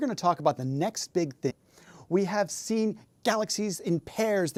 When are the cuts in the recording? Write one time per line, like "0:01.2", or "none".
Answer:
none